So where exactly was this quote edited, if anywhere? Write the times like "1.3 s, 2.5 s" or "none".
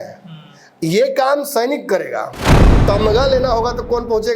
2.8 s